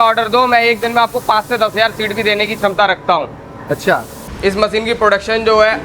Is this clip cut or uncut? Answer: cut